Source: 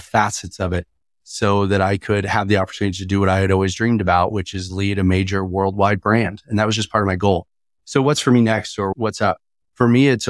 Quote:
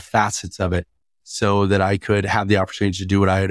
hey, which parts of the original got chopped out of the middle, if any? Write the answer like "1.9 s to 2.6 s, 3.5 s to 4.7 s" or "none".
none